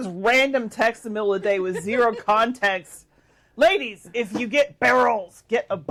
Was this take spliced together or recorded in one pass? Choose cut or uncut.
uncut